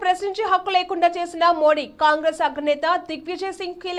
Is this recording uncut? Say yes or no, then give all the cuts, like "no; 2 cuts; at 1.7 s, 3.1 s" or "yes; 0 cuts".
yes; 0 cuts